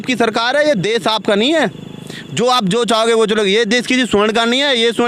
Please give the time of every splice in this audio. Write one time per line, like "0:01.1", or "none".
none